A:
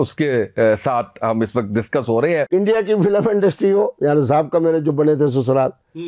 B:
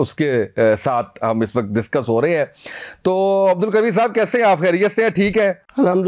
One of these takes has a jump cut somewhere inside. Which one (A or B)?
A